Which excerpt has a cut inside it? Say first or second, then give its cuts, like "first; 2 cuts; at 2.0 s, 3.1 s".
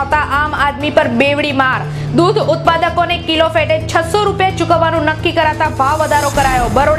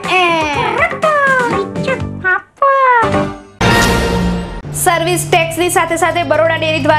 second; 1 cut; at 3.4 s